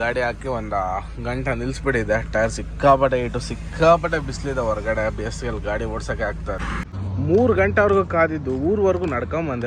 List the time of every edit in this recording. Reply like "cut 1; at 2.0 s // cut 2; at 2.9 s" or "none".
cut 1; at 6.8 s